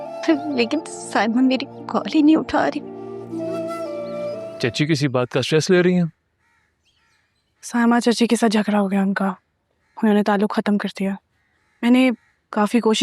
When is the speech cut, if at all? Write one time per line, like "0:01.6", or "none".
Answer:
0:04.5

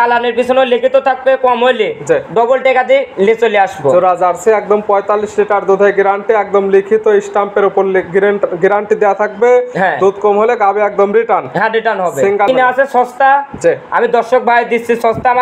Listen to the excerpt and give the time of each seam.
0:12.5

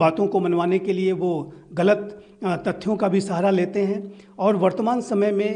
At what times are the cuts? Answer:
none

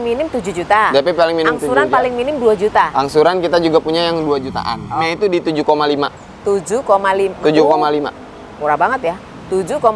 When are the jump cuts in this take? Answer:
0:05.1

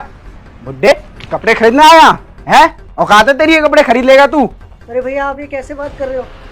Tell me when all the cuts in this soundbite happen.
0:00.9

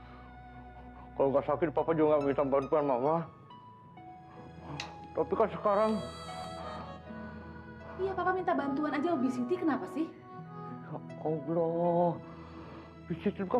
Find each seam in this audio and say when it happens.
0:04.3

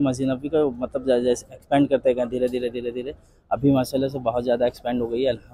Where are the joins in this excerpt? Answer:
none

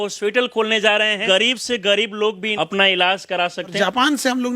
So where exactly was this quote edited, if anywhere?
0:01.2
0:02.5
0:03.7

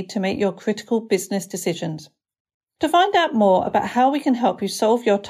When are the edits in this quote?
none

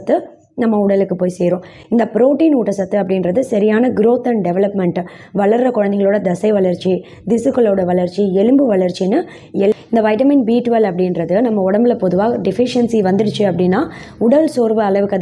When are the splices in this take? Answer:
0:09.7

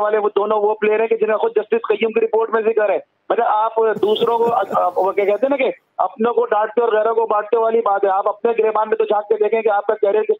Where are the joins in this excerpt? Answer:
none

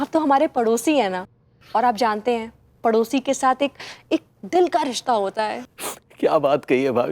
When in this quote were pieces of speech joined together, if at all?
0:05.7

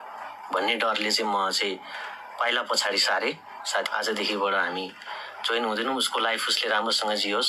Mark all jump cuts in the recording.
0:03.9

